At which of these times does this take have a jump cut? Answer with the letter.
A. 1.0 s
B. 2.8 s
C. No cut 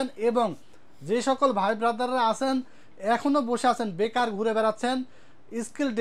C